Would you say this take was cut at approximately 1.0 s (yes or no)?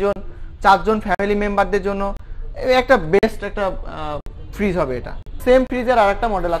no